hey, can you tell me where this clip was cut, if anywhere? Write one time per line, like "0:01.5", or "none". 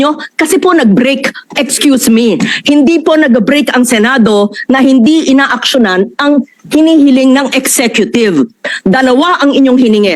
none